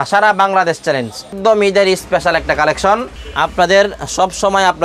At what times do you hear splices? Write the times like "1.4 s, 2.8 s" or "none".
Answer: 1.3 s, 3.2 s